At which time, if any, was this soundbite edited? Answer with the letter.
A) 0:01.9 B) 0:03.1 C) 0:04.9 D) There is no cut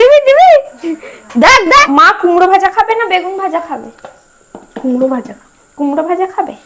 A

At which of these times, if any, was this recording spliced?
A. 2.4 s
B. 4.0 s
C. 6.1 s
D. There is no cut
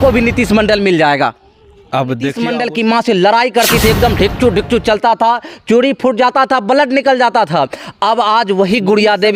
A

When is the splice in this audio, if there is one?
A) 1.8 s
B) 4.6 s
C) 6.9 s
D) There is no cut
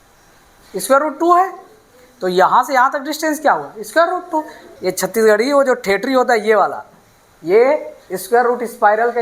B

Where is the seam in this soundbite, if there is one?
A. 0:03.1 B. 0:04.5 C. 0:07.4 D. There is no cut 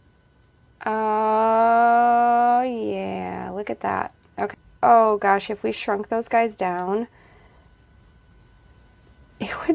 B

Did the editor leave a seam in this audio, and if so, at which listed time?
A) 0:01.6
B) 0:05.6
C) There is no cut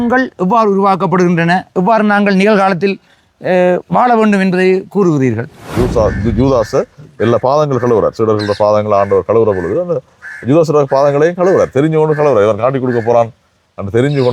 B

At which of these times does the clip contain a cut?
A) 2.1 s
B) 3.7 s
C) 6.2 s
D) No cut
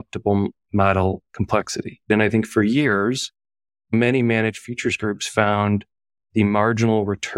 A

